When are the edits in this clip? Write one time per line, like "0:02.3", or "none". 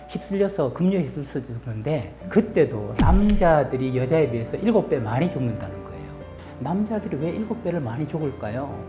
0:02.9
0:06.2